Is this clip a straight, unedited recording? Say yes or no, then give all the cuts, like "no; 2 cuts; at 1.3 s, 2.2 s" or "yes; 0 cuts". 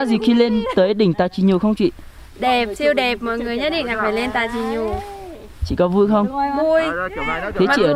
yes; 0 cuts